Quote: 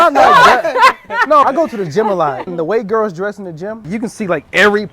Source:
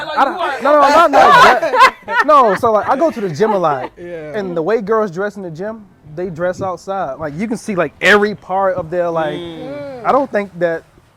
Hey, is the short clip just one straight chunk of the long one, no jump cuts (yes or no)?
no